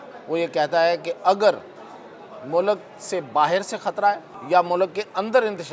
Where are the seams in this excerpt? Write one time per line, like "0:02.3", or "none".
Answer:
0:04.3

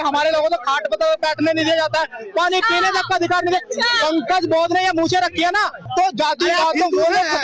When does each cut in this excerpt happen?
0:05.8

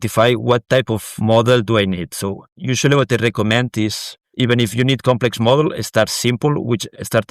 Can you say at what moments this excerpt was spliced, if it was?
0:01.0

